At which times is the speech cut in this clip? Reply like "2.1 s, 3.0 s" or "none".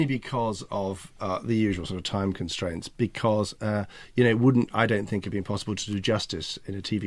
none

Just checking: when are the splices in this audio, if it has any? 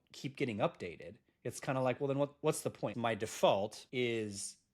2.9 s, 3.8 s

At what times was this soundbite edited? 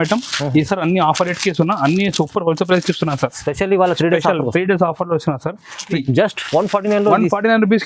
6.0 s

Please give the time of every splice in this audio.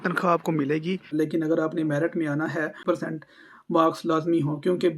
1.1 s, 2.8 s

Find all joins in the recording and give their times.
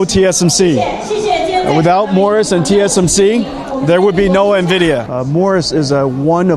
5.1 s

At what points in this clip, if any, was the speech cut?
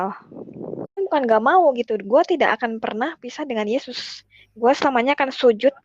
1.0 s

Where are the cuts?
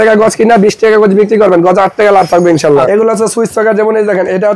2.9 s

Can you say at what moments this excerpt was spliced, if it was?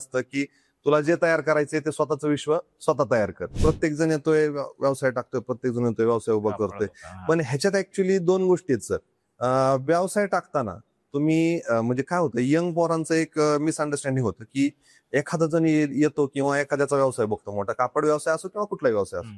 3.5 s

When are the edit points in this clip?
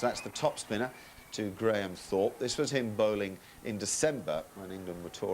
2.4 s

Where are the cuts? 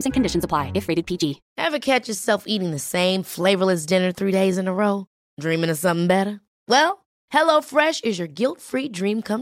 1.5 s

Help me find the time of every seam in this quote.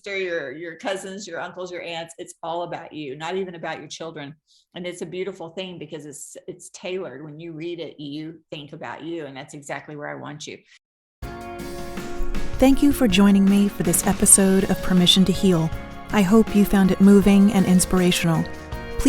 10.8 s

